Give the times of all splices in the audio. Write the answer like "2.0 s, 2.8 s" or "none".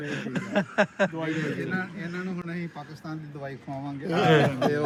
none